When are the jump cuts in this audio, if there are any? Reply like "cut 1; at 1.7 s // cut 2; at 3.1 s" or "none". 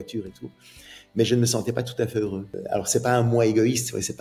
cut 1; at 2.6 s